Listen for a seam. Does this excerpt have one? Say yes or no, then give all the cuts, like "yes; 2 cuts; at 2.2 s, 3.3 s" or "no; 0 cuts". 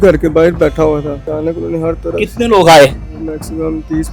yes; 1 cut; at 1.3 s